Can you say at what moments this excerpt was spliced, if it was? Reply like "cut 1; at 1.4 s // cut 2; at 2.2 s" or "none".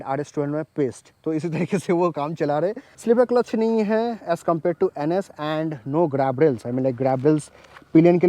cut 1; at 2.9 s